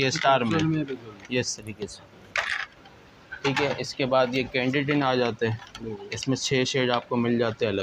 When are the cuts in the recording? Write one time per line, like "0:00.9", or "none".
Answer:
none

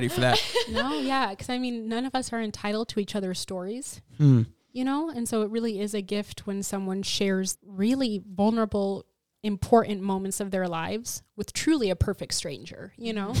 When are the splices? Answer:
0:07.6
0:09.3

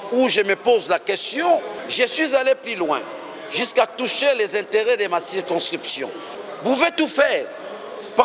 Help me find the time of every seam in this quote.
0:01.8
0:06.3

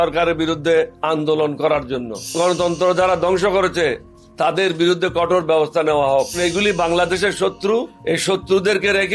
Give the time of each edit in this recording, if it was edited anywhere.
0:01.0
0:02.3
0:06.4
0:07.9

